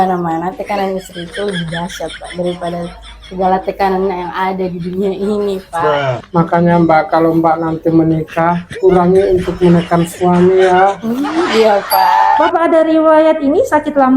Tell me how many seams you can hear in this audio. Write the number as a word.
one